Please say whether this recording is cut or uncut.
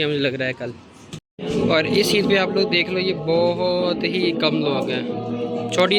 uncut